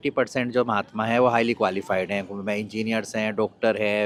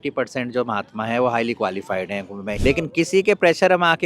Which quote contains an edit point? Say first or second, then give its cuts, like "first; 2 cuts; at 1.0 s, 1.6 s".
second; 1 cut; at 2.5 s